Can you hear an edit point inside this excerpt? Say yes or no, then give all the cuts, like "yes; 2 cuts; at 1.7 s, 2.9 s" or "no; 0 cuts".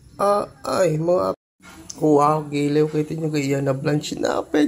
yes; 1 cut; at 1.3 s